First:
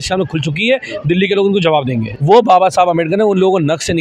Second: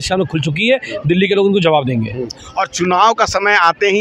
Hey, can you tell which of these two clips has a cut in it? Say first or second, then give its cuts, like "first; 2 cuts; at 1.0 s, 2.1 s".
first; 1 cut; at 2.1 s